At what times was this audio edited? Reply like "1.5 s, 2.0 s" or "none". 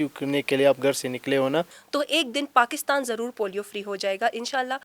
1.8 s